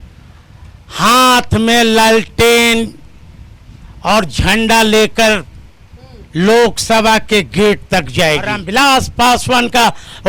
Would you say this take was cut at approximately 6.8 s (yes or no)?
no